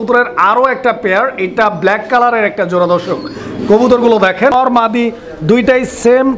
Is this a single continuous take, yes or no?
no